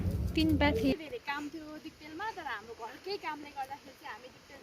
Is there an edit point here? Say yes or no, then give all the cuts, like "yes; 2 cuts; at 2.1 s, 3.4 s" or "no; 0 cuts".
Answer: yes; 1 cut; at 0.9 s